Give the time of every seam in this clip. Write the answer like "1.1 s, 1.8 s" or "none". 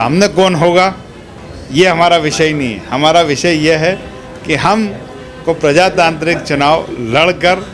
none